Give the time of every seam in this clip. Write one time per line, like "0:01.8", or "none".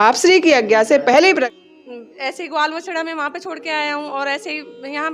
0:01.5